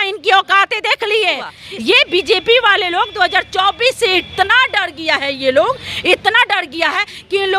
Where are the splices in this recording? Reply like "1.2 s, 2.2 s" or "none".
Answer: 1.5 s

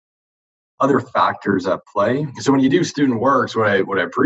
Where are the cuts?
2.3 s

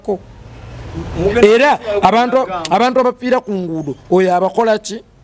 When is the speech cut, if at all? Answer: none

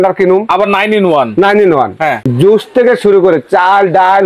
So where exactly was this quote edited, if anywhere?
2.2 s

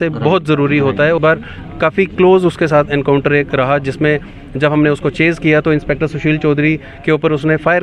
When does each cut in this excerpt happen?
1.2 s

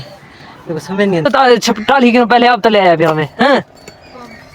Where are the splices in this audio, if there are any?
1.2 s

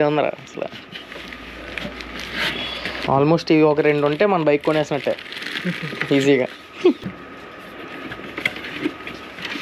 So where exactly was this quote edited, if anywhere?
3.0 s, 7.0 s

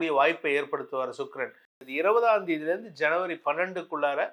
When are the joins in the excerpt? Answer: 1.8 s

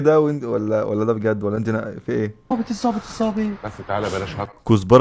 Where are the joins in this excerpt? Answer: 2.5 s

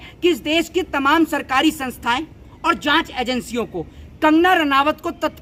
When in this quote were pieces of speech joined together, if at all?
none

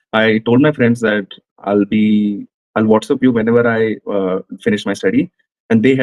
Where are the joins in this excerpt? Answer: none

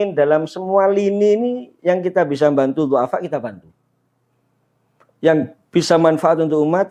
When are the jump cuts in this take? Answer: none

